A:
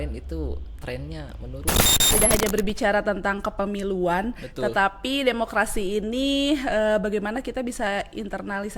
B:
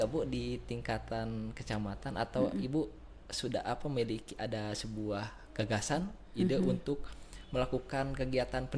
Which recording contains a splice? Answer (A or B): A